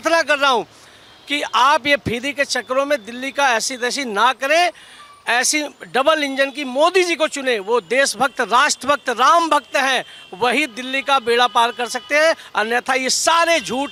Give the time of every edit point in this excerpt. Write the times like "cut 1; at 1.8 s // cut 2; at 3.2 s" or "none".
none